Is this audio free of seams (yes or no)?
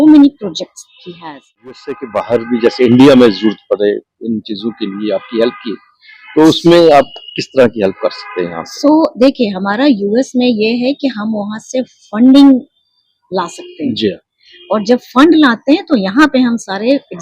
no